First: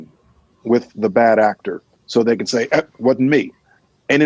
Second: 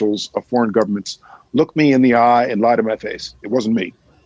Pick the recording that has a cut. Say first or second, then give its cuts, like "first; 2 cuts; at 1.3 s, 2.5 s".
first; 1 cut; at 0.9 s